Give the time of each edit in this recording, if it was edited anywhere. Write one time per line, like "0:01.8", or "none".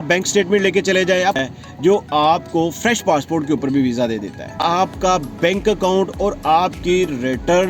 0:01.4
0:04.5

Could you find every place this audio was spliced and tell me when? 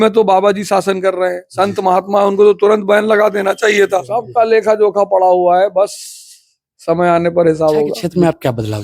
0:04.2
0:08.0

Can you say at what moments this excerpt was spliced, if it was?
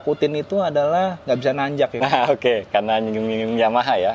0:02.0

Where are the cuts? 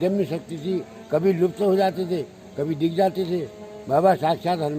none

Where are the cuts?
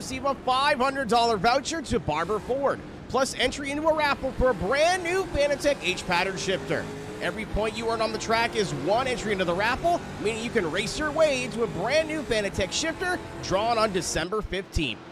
none

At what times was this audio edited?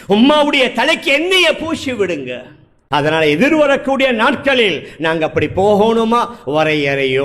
0:02.8

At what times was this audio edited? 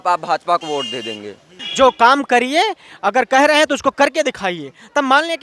0:01.6

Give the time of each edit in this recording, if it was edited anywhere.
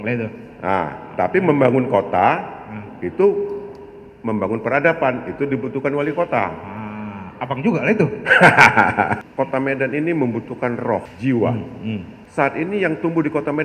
0:09.2
0:11.1
0:12.2

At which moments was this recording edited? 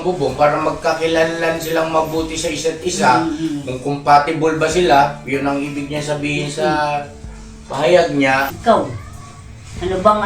0:08.5

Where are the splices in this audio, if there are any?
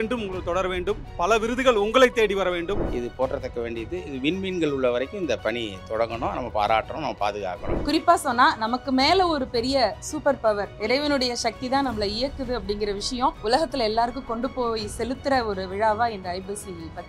0:02.8
0:07.7
0:10.7
0:13.4

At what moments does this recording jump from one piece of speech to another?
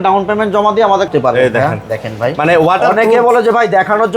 0:01.1

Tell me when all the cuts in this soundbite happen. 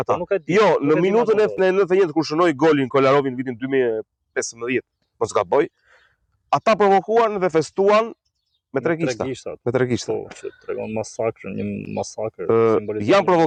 none

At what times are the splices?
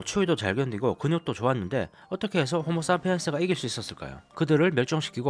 none

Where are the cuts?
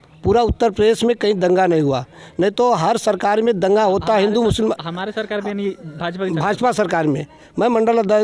none

